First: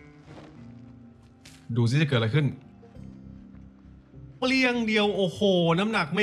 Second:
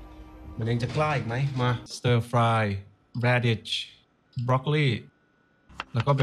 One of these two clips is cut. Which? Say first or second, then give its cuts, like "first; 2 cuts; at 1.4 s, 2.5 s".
second; 1 cut; at 1.9 s